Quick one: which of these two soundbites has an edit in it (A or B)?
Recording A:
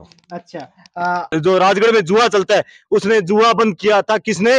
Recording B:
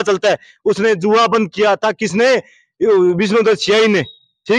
A